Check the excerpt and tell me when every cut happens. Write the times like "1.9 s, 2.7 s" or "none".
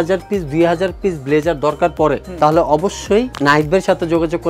none